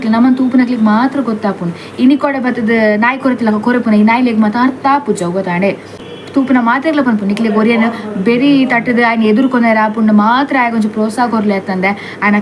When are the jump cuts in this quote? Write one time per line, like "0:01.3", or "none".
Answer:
0:06.1